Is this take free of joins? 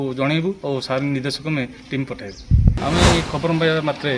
no; 1 cut; at 2.8 s

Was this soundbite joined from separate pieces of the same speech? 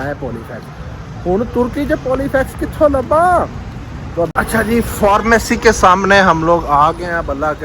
yes; 1 cut; at 4.3 s

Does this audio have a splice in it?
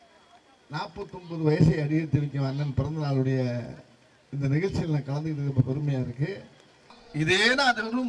yes; 1 cut; at 7.0 s

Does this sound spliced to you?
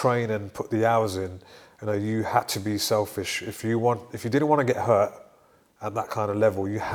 no; 0 cuts

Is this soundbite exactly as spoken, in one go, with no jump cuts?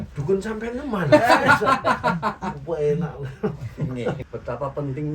no; 1 cut; at 4.2 s

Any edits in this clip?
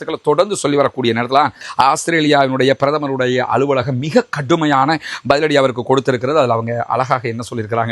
yes; 1 cut; at 1.6 s

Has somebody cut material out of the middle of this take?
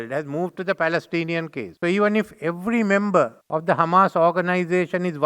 yes; 2 cuts; at 1.6 s, 3.4 s

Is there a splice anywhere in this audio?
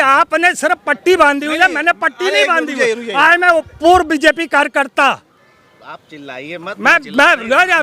no; 0 cuts

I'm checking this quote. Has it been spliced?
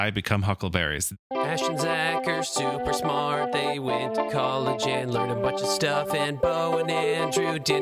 yes; 1 cut; at 1.1 s

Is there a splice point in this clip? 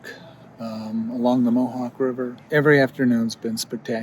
yes; 1 cut; at 2.3 s

